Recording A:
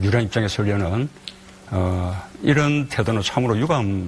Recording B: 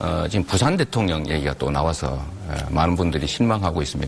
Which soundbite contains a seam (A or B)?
B